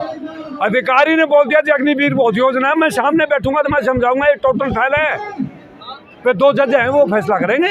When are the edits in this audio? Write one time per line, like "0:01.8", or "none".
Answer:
none